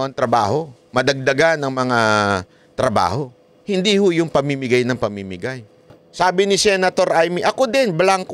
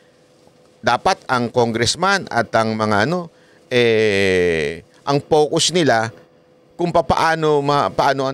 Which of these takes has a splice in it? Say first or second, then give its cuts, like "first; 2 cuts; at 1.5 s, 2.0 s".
first; 1 cut; at 6.0 s